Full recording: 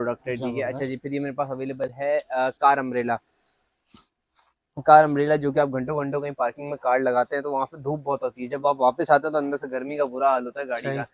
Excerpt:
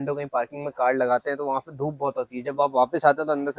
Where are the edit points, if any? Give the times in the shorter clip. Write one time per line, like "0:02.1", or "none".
none